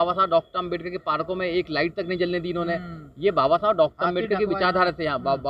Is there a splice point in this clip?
no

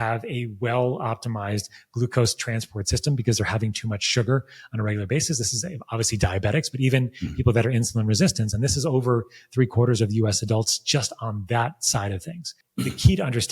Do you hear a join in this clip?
yes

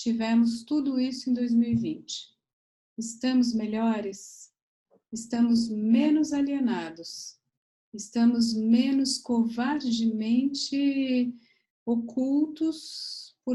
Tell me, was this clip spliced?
no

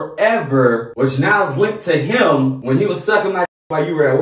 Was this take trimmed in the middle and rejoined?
yes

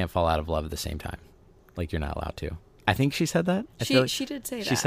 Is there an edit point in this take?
no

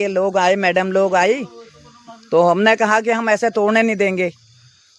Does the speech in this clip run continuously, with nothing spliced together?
yes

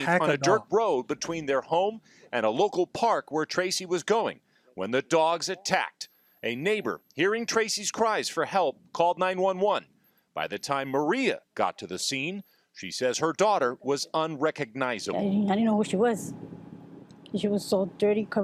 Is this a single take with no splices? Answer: yes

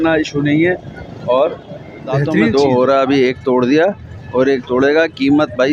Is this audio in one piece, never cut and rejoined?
no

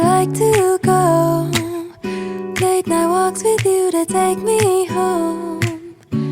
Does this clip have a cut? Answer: no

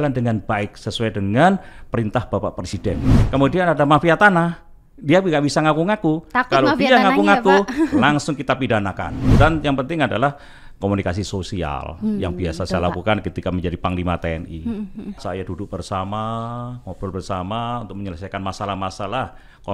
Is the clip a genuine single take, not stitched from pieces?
no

